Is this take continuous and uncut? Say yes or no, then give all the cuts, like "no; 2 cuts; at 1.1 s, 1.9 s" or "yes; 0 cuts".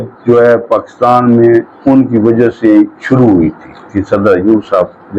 no; 1 cut; at 4.0 s